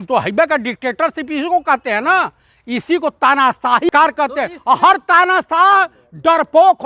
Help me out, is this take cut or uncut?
cut